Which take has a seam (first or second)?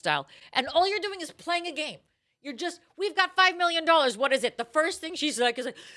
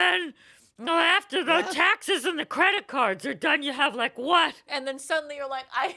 second